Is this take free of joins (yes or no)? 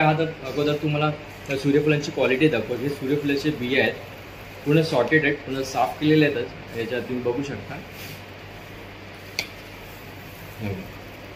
yes